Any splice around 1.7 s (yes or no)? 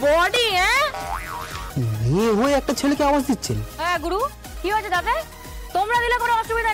yes